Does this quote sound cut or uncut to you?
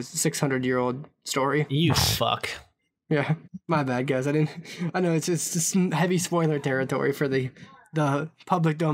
uncut